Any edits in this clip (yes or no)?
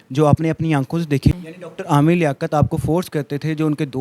yes